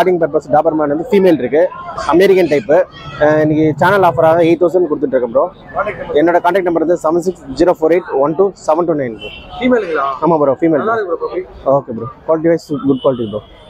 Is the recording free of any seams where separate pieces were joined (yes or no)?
yes